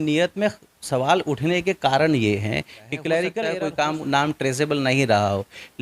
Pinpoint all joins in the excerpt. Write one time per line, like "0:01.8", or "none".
0:03.5